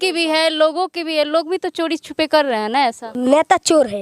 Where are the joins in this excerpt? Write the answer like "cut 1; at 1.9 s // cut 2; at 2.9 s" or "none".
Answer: cut 1; at 3.1 s

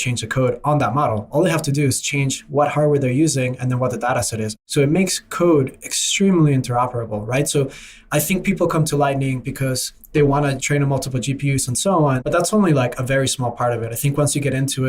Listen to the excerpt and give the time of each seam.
cut 1; at 4.6 s // cut 2; at 10.6 s // cut 3; at 12.2 s

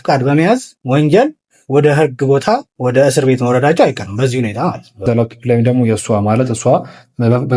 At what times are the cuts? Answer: cut 1; at 5.0 s

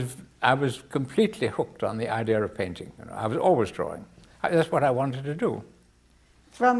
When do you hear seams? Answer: cut 1; at 2.2 s

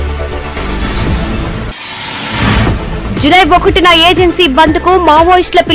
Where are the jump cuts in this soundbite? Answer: cut 1; at 1.5 s // cut 2; at 2.5 s

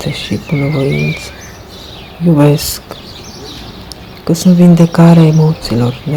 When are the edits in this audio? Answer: none

